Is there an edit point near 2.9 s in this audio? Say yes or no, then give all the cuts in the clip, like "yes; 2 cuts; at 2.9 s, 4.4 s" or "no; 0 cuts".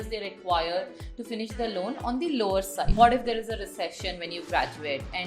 yes; 1 cut; at 2.9 s